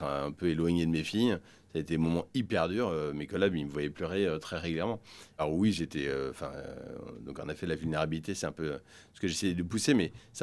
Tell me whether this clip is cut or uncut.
uncut